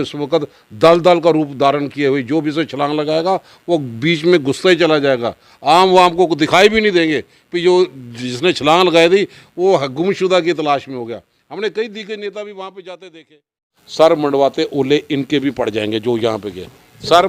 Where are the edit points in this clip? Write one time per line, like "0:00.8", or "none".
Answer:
0:13.8